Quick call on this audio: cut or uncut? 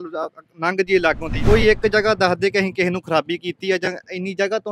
cut